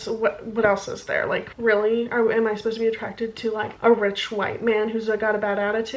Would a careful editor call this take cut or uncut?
uncut